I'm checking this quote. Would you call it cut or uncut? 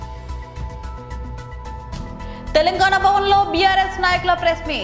uncut